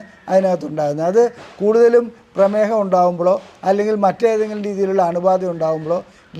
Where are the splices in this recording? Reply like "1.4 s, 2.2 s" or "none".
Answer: none